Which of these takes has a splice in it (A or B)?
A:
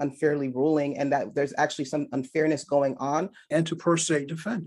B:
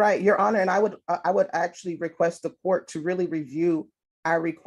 A